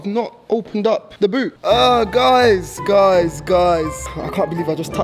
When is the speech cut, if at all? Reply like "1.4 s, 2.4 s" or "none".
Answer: 1.0 s, 4.0 s

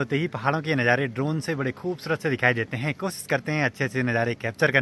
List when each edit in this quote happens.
none

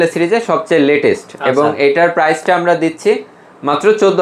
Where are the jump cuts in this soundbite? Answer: none

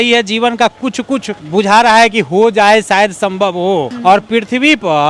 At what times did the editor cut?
none

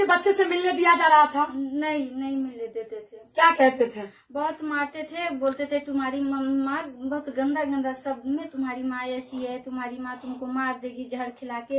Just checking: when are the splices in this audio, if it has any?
none

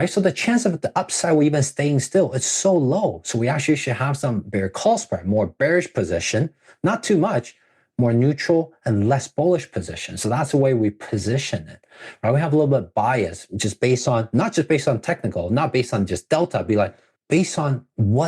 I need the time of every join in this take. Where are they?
17.1 s

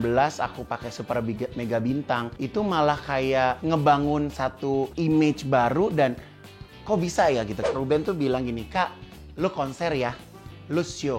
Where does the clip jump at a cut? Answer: 2.3 s, 3.6 s, 4.9 s, 7.6 s

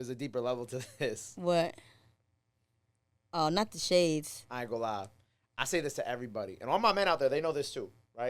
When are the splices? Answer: none

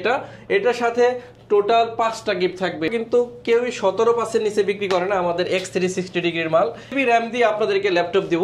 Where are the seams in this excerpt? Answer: 2.9 s, 6.9 s

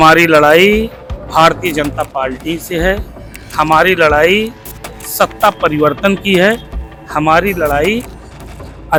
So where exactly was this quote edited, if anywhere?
none

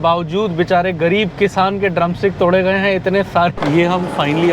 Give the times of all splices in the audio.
3.5 s

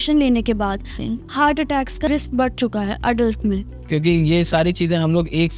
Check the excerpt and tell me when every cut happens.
2.1 s, 3.7 s

